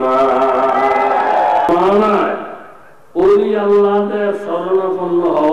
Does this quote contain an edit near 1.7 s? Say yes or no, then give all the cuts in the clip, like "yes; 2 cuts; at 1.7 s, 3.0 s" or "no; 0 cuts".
yes; 1 cut; at 1.7 s